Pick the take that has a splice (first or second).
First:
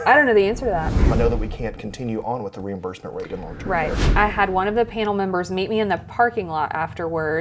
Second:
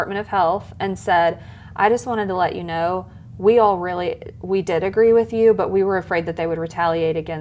first